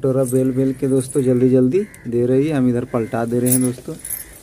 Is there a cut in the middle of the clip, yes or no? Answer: no